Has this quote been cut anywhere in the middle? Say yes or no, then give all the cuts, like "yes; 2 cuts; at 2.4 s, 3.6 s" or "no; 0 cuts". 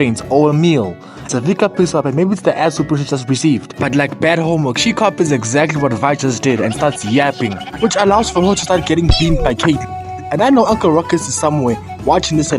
yes; 1 cut; at 1.2 s